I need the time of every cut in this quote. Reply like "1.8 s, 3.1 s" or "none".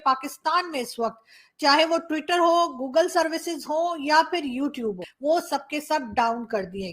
5.1 s